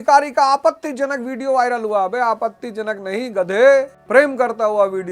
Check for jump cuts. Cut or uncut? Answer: cut